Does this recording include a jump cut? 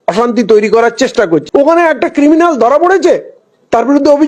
yes; 1 cut; at 1.4 s

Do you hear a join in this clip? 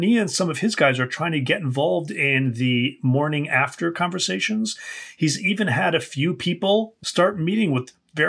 yes; 1 cut; at 7.0 s

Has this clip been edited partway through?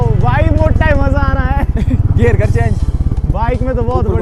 no; 0 cuts

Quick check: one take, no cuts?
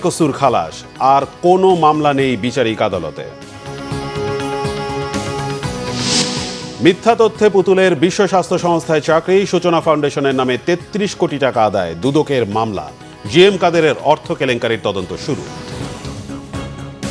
no; 1 cut; at 15.9 s

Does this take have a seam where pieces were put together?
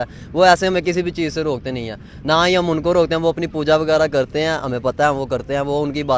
no; 0 cuts

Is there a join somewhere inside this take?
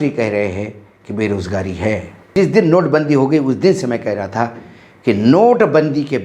yes; 1 cut; at 2.3 s

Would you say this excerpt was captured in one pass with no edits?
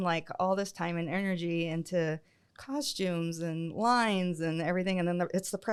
yes; 0 cuts

